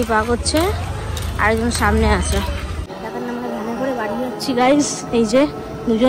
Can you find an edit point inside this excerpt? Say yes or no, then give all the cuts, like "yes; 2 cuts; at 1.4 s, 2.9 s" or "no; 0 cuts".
yes; 1 cut; at 2.9 s